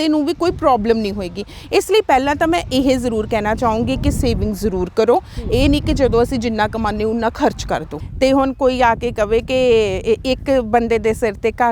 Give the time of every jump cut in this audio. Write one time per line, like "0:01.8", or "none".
0:08.0